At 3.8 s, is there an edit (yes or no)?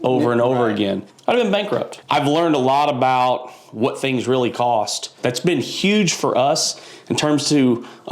no